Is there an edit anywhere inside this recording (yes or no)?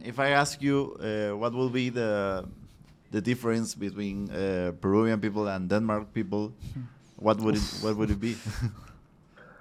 no